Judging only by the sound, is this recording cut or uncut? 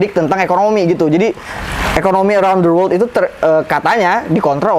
uncut